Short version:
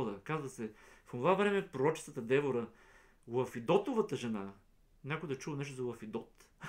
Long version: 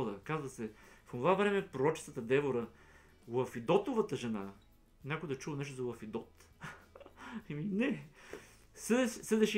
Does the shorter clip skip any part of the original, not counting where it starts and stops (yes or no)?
no